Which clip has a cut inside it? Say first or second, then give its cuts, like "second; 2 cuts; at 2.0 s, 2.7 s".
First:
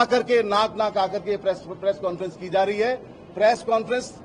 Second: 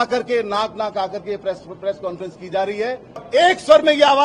second; 1 cut; at 3.2 s